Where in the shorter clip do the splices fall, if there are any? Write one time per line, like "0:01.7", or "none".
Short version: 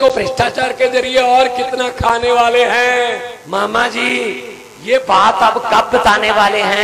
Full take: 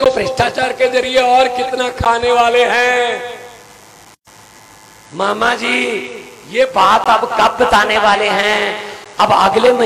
0:03.3

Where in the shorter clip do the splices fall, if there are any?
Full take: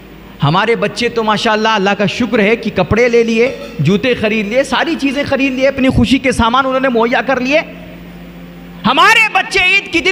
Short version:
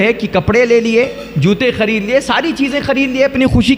none

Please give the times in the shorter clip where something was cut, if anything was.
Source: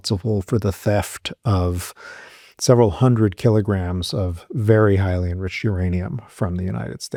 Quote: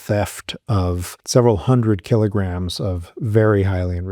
0:01.1

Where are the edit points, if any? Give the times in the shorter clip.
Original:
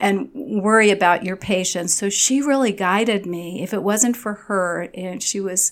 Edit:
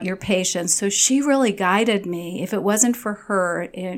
none

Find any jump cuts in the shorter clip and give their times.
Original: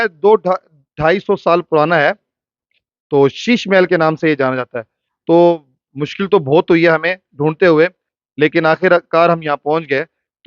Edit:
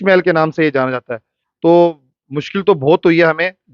none

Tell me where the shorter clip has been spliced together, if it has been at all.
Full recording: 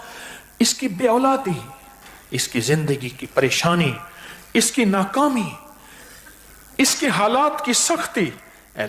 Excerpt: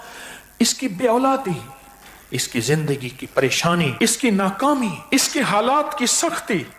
0:03.9
0:05.0

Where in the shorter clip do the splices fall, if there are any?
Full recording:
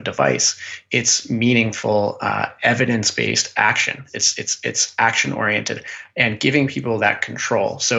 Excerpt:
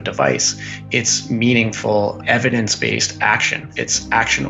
0:02.2
0:03.6

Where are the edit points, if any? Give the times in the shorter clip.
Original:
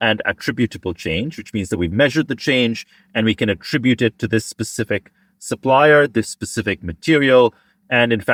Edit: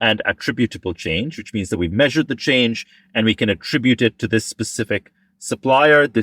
none

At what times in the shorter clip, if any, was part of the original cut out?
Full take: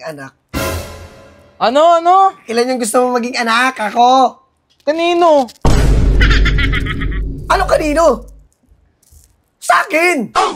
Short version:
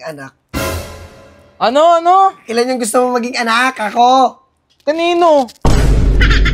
none

